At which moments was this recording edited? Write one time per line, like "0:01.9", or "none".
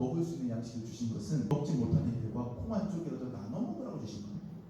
0:01.5